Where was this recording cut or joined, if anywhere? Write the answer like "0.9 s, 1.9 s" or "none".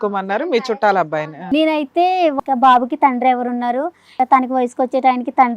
1.4 s, 2.3 s, 4.1 s